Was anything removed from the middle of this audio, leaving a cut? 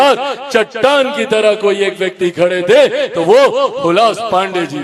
no; 0 cuts

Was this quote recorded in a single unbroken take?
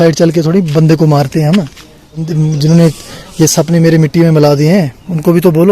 no; 1 cut; at 2.3 s

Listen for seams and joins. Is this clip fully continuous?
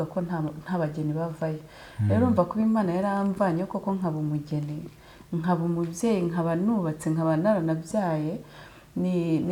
yes; 0 cuts

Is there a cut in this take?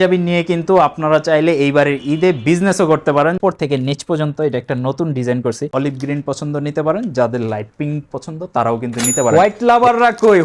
yes; 3 cuts; at 3.4 s, 5.7 s, 9.3 s

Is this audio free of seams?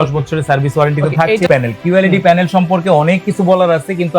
no; 1 cut; at 1.5 s

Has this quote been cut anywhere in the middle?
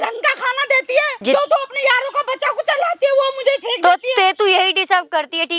yes; 1 cut; at 1.1 s

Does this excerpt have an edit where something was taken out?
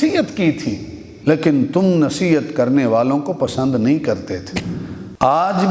yes; 1 cut; at 1.1 s

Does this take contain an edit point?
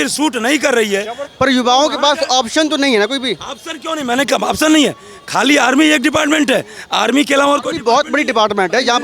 yes; 1 cut; at 1.2 s

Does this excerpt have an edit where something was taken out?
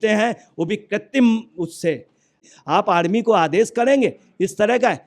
yes; 1 cut; at 2.4 s

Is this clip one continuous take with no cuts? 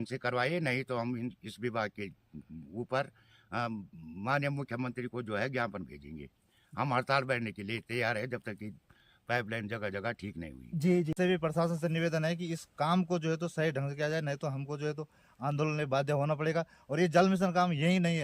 no; 1 cut; at 11.2 s

